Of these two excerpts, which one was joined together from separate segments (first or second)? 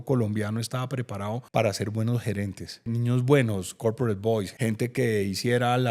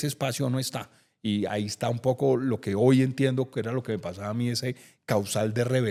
first